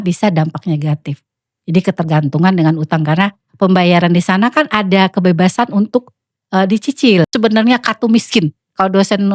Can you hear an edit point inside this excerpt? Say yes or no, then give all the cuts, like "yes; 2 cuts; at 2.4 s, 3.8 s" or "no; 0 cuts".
yes; 1 cut; at 7.3 s